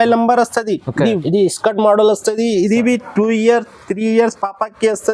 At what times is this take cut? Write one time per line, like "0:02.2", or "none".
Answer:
0:01.2

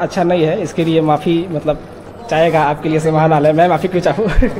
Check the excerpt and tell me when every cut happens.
none

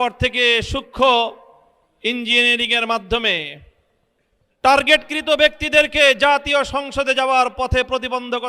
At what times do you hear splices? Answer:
none

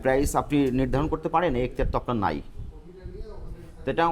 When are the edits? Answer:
none

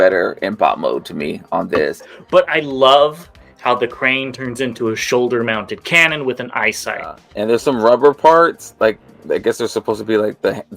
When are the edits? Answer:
0:02.1
0:07.2

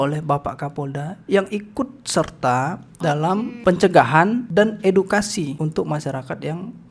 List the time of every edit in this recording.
0:03.5
0:04.4
0:05.5

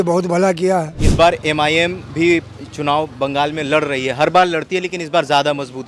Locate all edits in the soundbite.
0:01.0

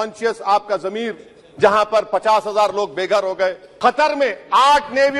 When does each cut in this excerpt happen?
0:03.6

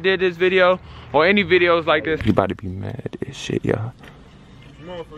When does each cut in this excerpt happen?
0:02.2

